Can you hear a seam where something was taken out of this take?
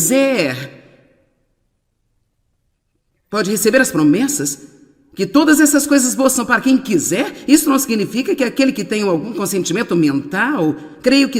yes; 1 cut; at 10.3 s

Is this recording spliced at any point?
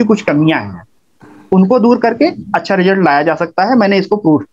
no; 0 cuts

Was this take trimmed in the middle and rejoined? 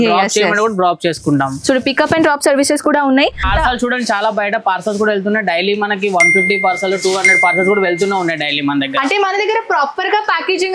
yes; 1 cut; at 3.5 s

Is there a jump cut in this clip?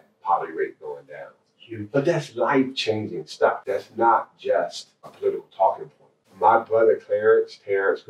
yes; 3 cuts; at 3.6 s, 5.1 s, 6.2 s

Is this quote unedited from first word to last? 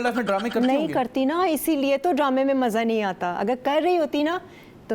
yes; 0 cuts

